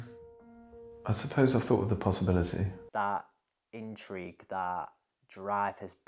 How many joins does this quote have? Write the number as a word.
one